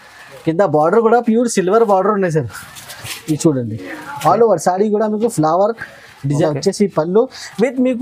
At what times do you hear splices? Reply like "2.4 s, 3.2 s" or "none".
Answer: 6.4 s